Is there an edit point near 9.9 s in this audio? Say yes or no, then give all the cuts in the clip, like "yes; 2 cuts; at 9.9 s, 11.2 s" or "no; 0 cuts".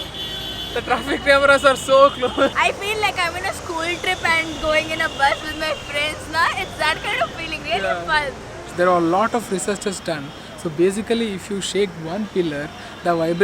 no; 2 cuts; at 2.5 s, 8.6 s